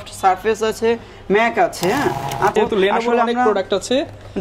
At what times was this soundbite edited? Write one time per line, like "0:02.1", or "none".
0:02.5